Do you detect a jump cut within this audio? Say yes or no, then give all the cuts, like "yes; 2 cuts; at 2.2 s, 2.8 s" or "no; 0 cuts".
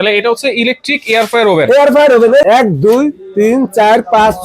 yes; 1 cut; at 2.4 s